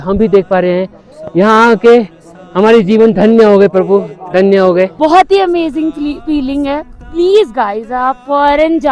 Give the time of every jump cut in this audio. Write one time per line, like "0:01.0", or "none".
0:04.9